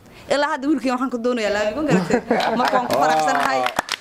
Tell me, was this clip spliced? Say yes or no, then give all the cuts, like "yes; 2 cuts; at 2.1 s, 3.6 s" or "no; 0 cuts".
no; 0 cuts